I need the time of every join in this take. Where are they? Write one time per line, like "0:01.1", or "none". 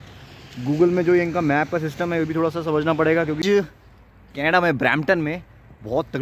0:03.4